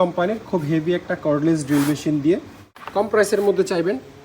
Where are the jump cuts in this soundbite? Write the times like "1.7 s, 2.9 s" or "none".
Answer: 2.8 s